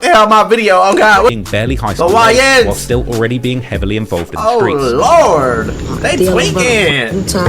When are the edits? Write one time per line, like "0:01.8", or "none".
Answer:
0:01.3